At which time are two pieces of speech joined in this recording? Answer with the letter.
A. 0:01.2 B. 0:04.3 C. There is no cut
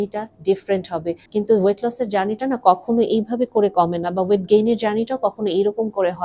A